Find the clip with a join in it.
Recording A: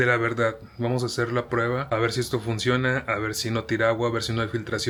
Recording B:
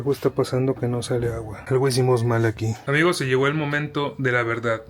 B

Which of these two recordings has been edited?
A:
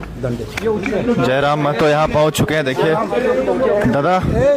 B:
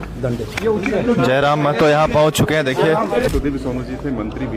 B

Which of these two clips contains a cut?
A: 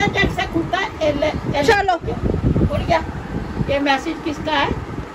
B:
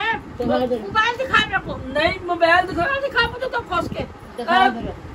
B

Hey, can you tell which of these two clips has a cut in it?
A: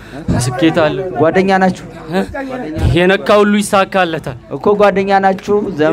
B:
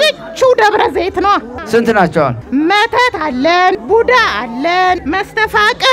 B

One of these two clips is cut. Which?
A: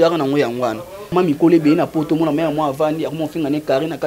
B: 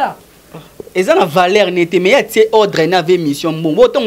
A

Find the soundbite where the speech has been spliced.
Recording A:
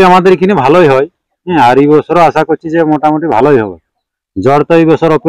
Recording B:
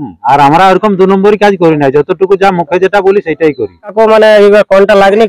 B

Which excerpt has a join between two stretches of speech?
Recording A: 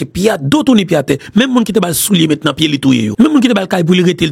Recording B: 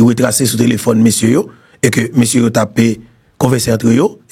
A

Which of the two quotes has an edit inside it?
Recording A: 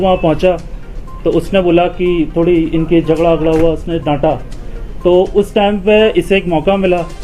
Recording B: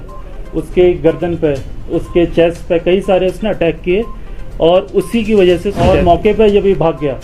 B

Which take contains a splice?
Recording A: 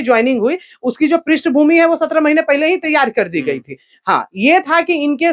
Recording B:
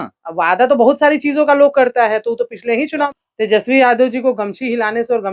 B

